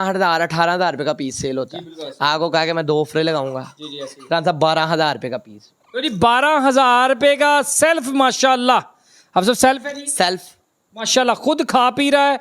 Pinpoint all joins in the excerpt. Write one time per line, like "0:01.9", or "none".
none